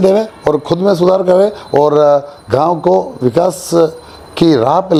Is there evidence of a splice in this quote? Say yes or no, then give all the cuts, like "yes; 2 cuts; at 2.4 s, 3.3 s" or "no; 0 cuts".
no; 0 cuts